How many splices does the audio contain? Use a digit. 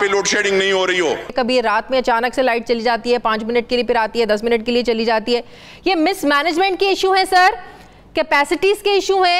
1